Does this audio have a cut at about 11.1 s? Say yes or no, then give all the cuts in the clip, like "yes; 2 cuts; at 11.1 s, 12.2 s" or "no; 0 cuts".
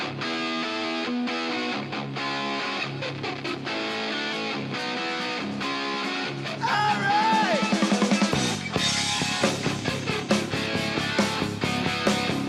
no; 1 cut; at 1.6 s